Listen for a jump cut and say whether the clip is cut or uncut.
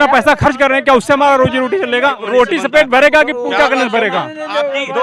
cut